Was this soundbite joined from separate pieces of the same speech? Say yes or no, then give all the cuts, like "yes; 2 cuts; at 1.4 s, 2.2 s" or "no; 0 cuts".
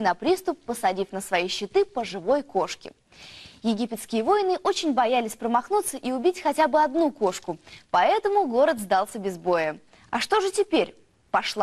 no; 0 cuts